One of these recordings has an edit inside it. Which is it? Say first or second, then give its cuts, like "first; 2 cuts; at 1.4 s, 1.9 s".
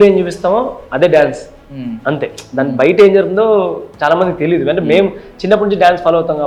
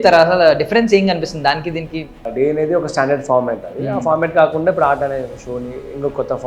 second; 1 cut; at 2.3 s